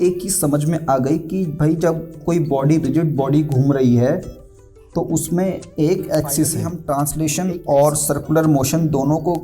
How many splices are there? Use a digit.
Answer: 1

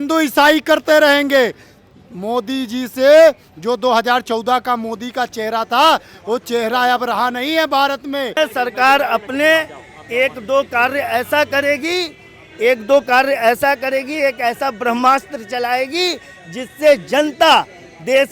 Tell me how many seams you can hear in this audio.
1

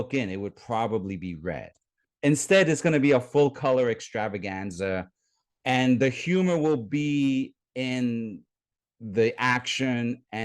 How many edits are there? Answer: 1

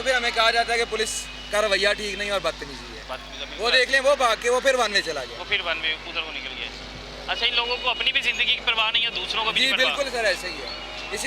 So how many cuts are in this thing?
0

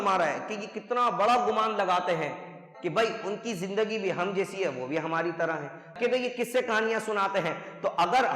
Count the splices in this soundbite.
1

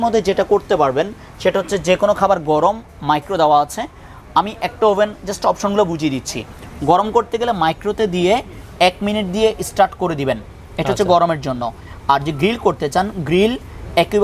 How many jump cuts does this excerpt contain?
0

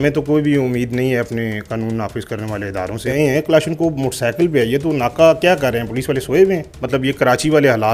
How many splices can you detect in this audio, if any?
2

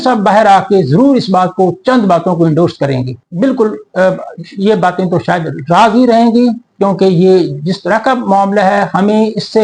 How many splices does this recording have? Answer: 1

